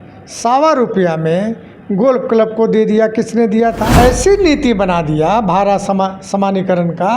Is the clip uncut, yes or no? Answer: no